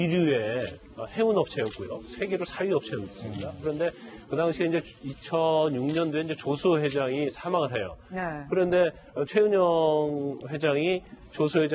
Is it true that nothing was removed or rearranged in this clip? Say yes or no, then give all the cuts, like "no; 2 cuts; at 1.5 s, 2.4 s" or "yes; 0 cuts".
no; 1 cut; at 1.3 s